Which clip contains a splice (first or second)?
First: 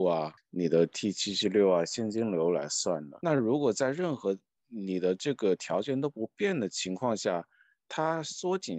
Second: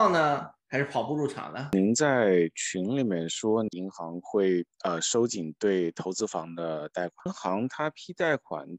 second